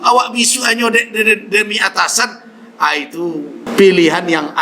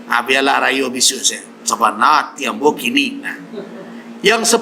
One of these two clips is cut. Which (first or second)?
first